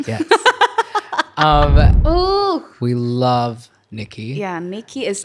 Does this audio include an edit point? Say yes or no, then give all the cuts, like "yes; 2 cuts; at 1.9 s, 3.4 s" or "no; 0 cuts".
yes; 1 cut; at 2.0 s